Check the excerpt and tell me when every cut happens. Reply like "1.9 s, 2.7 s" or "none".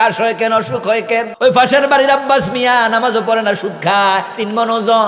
1.3 s